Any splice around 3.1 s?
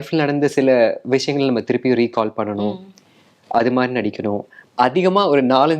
no; 1 cut; at 4.5 s

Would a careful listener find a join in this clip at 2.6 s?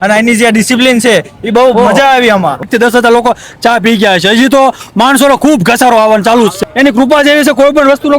yes; 2 cuts; at 2.6 s, 6.6 s

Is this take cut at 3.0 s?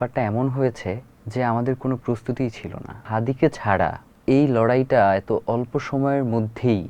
yes; 3 cuts; at 1.1 s, 3.0 s, 4.1 s

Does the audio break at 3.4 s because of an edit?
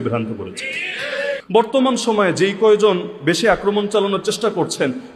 no; 1 cut; at 1.4 s

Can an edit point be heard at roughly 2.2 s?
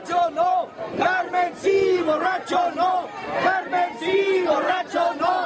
no; 0 cuts

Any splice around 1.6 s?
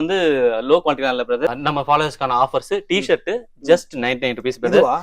yes; 1 cut; at 1.6 s

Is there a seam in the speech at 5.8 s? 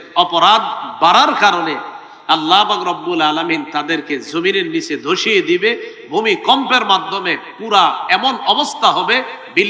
no; 0 cuts

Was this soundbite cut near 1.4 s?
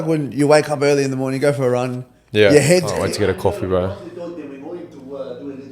no; 1 cut; at 2.9 s

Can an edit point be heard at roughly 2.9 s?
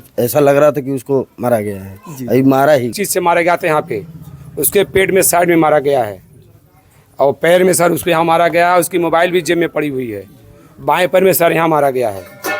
yes; 1 cut; at 2.9 s

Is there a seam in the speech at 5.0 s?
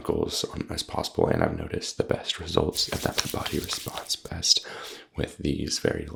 no; 0 cuts

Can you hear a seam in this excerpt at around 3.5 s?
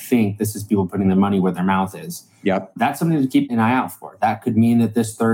yes; 1 cut; at 3.5 s

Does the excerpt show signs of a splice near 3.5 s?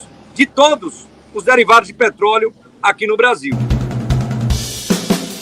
yes; 1 cut; at 3.5 s

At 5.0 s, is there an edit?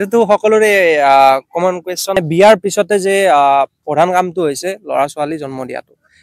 no; 1 cut; at 2.2 s

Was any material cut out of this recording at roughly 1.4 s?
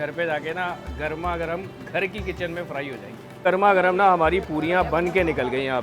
no; 1 cut; at 3.5 s

